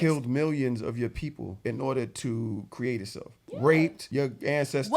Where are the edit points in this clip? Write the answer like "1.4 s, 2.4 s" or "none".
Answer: 1.6 s, 3.5 s, 4.0 s